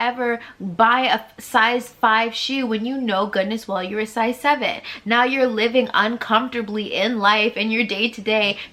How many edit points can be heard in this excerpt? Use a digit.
0